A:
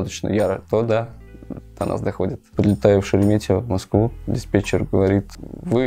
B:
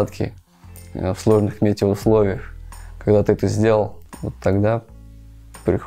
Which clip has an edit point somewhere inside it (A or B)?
A